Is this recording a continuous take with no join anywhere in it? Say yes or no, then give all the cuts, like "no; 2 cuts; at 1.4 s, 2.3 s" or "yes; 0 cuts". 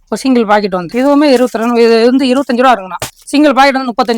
no; 1 cut; at 3.1 s